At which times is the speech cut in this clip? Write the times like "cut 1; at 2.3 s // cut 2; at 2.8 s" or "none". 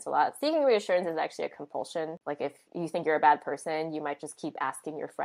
cut 1; at 2.2 s